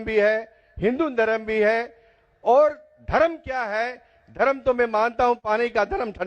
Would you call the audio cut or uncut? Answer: cut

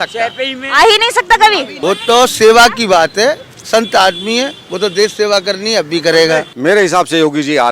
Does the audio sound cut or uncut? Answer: cut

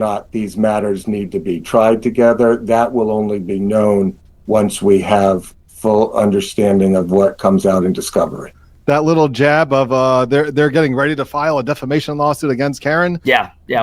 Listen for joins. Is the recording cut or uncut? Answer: uncut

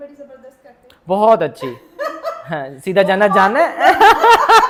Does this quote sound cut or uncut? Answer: uncut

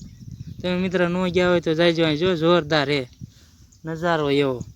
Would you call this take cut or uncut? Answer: uncut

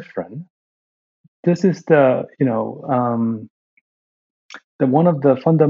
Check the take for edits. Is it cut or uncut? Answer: uncut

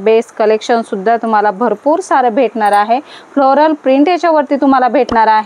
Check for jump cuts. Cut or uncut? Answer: uncut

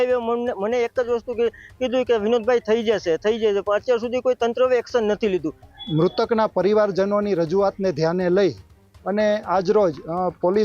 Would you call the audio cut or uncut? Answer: cut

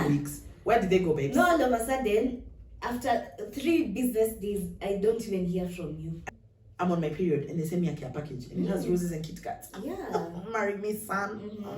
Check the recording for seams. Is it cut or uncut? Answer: cut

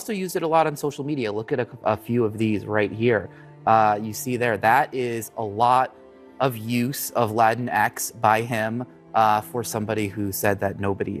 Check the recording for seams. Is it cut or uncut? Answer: uncut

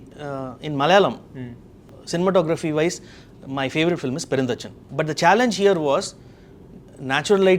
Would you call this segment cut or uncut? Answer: cut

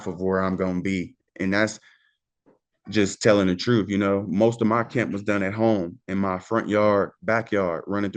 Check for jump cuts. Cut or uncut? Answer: uncut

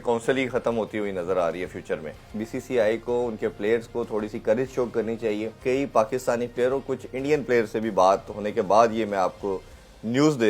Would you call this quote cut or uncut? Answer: cut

